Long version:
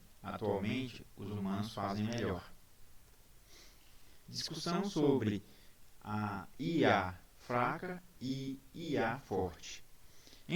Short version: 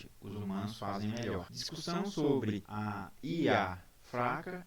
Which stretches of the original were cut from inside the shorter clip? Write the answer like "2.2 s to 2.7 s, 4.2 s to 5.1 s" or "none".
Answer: 2.6 s to 4.4 s, 5.5 s to 6.1 s